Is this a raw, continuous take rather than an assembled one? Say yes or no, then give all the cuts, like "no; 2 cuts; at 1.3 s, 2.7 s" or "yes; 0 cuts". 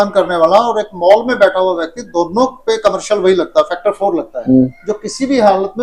yes; 0 cuts